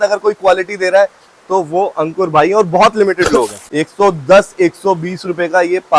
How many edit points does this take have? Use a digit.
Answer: 1